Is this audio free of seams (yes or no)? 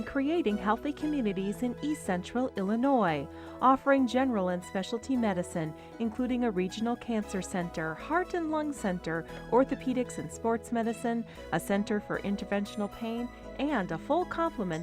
yes